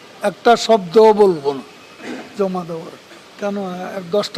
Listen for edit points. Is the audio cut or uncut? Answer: cut